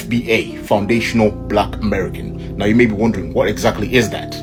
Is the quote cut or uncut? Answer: uncut